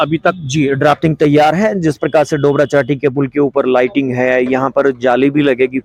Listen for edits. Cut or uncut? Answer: uncut